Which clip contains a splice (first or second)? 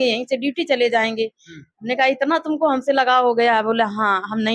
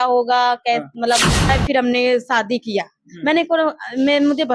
second